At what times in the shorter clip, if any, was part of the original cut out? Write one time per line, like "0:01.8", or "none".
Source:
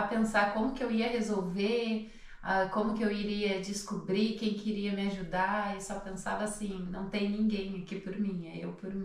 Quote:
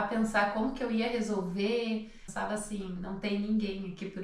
0:02.2